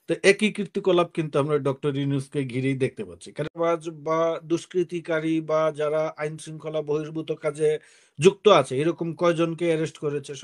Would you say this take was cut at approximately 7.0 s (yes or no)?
no